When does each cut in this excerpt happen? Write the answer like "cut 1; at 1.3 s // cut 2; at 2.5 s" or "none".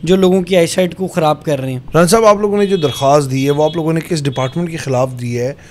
none